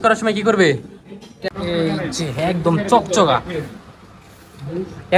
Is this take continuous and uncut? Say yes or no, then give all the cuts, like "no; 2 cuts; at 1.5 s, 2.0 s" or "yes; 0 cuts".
no; 1 cut; at 1.5 s